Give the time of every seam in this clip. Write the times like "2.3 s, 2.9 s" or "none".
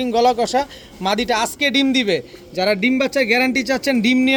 none